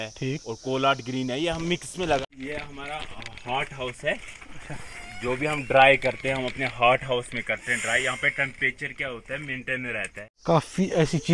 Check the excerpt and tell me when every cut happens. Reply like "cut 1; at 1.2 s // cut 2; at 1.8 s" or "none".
cut 1; at 2.2 s // cut 2; at 10.2 s